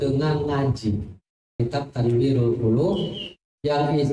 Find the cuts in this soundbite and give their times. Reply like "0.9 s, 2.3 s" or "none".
1.6 s